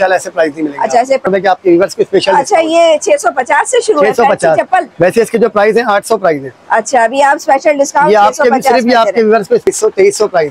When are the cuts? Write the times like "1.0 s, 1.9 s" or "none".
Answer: 1.2 s, 9.6 s